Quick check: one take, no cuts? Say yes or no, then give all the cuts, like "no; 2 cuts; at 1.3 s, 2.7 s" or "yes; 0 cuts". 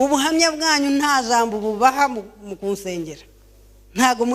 yes; 0 cuts